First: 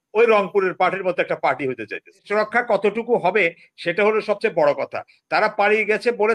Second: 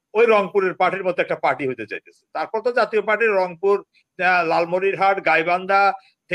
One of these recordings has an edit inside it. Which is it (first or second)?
first